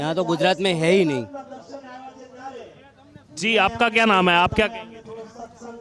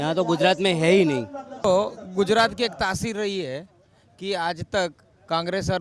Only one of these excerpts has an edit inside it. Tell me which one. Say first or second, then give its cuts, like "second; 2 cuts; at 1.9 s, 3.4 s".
second; 1 cut; at 1.6 s